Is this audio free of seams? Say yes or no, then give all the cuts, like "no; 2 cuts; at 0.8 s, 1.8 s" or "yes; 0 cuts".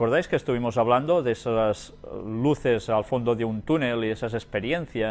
no; 1 cut; at 2.4 s